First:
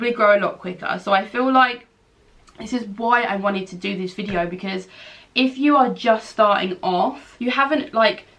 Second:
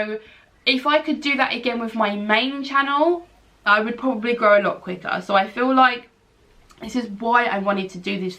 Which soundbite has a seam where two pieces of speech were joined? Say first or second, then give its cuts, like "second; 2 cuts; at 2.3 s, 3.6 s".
first; 1 cut; at 7.4 s